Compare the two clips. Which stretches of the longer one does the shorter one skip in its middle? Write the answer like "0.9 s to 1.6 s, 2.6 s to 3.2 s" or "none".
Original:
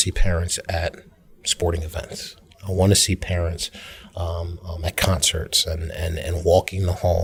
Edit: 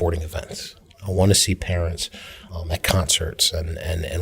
4.0 s to 4.6 s

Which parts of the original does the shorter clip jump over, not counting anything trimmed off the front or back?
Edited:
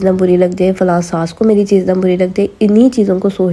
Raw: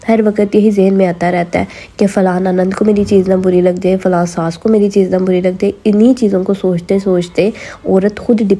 none

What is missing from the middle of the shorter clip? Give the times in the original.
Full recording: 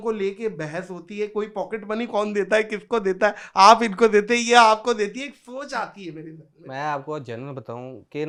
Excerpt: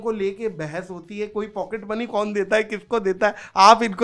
none

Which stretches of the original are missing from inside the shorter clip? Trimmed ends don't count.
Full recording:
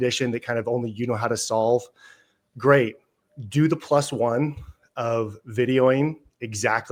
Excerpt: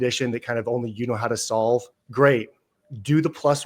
2.0 s to 2.4 s

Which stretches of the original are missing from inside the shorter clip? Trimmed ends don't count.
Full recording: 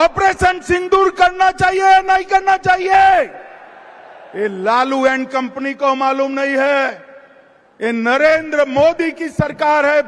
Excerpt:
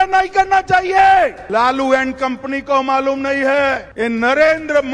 3.4 s to 4.6 s, 7.0 s to 7.7 s

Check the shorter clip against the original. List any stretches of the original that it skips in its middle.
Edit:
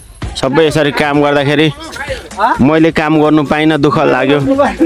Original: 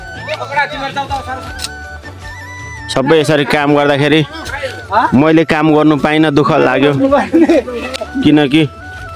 none

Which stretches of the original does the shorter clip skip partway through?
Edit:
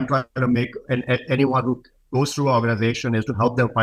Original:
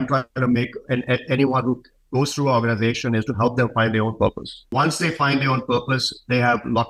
none

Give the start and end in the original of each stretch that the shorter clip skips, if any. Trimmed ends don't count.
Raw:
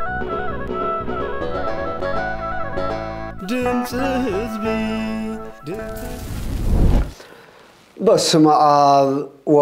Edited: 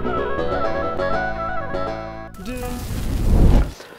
3.8 s to 6.2 s

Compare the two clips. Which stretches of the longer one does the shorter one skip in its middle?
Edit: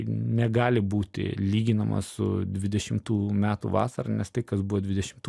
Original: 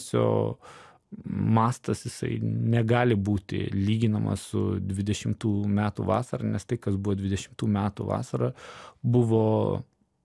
none

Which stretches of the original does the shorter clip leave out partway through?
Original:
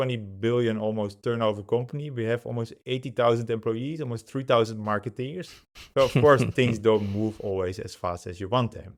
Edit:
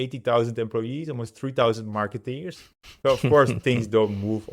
none

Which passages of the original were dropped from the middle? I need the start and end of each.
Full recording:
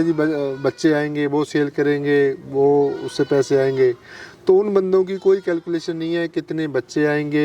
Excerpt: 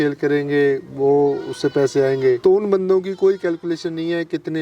3.9 s to 4.4 s

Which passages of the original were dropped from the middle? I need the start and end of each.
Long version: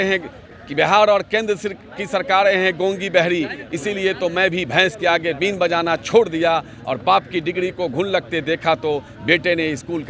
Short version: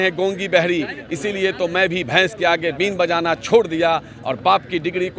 none

